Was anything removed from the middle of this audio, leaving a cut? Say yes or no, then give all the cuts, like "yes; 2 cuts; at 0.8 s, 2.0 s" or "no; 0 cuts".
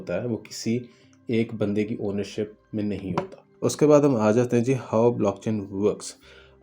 yes; 1 cut; at 3.5 s